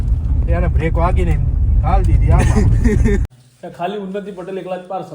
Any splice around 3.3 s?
yes; 1 cut; at 3.3 s

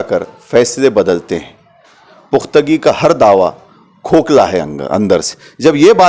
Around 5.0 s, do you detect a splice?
no; 0 cuts

